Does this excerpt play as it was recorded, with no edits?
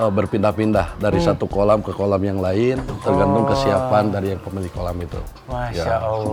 yes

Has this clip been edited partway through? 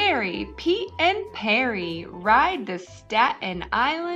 no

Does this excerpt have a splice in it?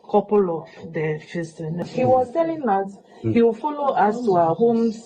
yes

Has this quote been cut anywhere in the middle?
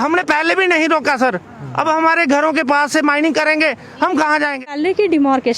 yes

